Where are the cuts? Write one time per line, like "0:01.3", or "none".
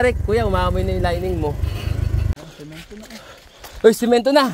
0:02.3